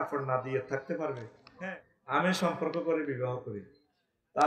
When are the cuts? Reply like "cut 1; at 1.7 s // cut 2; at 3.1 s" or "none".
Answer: cut 1; at 1.4 s